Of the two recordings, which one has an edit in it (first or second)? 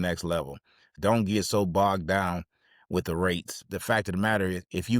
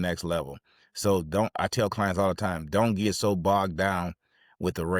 first